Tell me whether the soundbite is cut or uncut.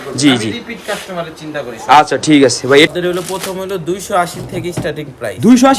cut